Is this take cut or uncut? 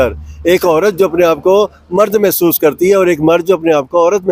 uncut